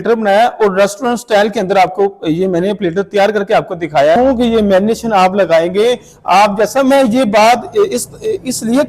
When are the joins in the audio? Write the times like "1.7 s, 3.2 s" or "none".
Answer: 4.2 s